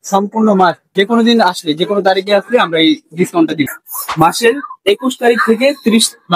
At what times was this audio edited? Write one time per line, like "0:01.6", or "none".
0:03.8